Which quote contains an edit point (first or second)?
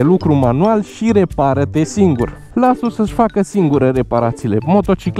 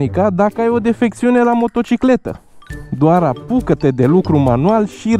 first